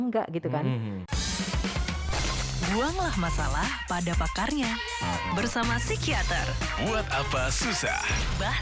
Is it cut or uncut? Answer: cut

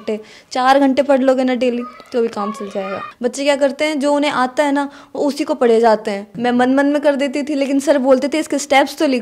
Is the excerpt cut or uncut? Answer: cut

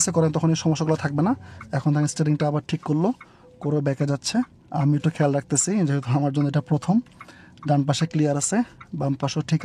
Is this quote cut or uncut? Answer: uncut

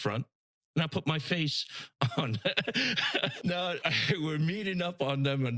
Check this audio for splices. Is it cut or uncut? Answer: cut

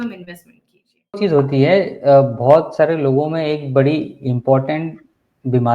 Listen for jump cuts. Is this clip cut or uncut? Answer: cut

